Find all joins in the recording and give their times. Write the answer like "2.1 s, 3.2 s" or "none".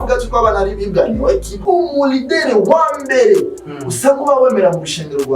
1.5 s